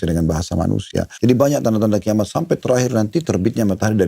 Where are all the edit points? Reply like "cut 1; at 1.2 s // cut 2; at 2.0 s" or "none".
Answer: cut 1; at 1.1 s